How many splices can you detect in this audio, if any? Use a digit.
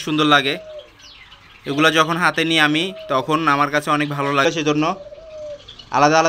1